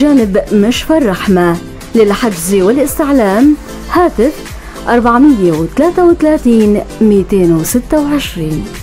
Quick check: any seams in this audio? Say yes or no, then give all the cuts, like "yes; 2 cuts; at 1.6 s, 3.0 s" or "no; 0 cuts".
no; 0 cuts